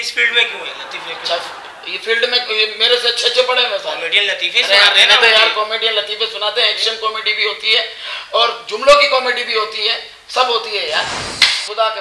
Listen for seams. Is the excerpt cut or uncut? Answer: uncut